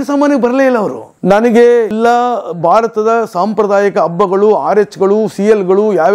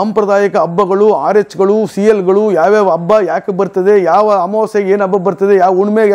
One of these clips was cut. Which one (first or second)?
first